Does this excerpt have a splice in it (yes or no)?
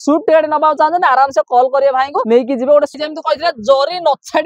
yes